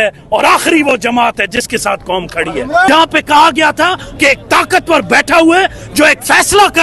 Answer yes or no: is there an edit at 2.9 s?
yes